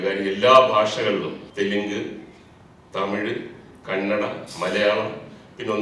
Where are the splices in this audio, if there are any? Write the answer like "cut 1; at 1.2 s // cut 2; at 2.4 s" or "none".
cut 1; at 1.4 s